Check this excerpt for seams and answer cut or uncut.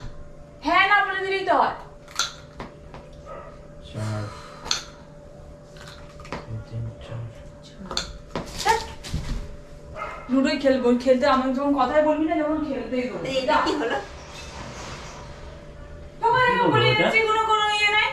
uncut